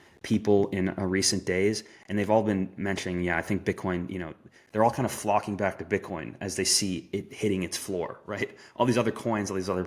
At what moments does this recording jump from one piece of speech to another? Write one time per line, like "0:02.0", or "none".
none